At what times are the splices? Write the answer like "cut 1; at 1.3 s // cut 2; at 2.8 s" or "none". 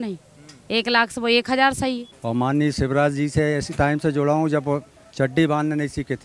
cut 1; at 2.1 s